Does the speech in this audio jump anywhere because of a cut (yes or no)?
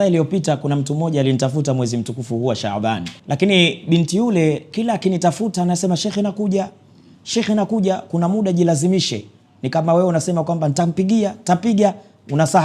yes